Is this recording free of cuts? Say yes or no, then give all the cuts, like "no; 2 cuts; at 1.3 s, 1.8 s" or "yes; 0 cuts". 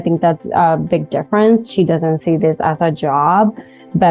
yes; 0 cuts